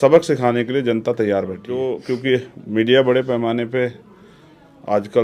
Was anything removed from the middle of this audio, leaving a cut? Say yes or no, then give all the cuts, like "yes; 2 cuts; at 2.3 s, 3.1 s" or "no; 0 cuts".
yes; 1 cut; at 1.9 s